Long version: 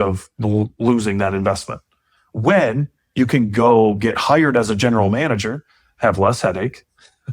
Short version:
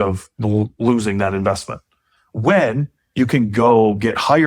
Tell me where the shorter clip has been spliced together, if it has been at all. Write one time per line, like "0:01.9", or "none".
none

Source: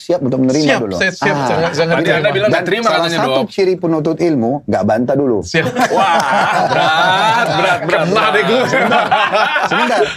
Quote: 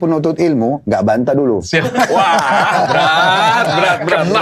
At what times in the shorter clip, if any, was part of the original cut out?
none

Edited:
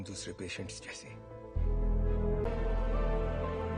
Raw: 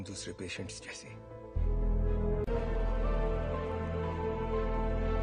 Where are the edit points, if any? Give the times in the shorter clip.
0:02.5

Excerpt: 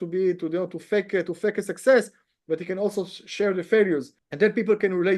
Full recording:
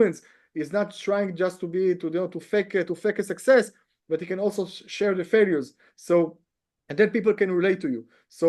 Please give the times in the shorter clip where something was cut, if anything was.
0:04.2

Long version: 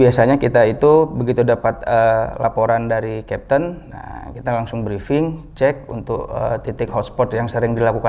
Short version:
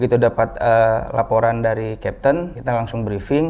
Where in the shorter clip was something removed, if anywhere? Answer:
0:02.5

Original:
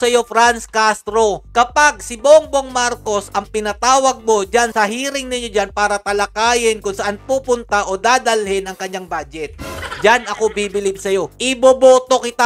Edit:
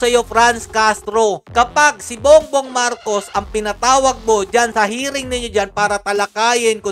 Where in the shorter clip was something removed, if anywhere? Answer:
none

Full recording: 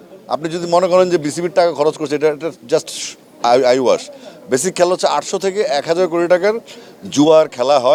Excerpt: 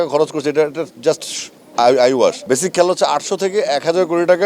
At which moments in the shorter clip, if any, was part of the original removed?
0:02.4

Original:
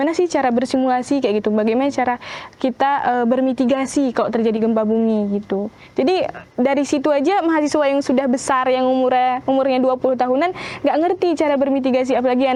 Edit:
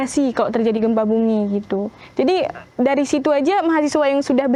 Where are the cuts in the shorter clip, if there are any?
none

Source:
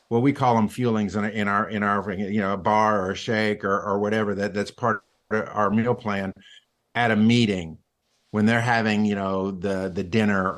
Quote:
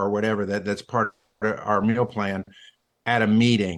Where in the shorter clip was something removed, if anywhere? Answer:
none

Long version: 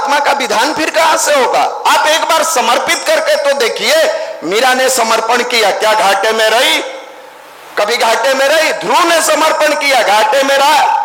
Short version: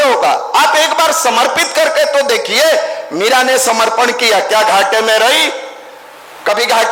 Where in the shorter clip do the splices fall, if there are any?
none

